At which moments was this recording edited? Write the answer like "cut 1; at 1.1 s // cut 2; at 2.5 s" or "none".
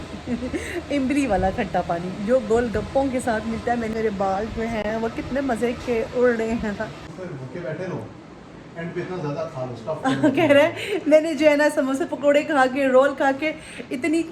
cut 1; at 3.9 s // cut 2; at 7.0 s